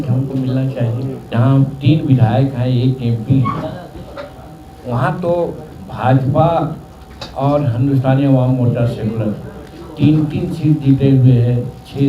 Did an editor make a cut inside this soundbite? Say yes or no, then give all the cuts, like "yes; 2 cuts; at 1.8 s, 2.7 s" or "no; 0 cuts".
yes; 1 cut; at 1.1 s